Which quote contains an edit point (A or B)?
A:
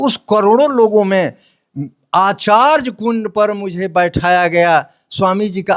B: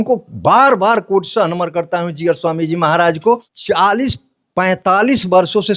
B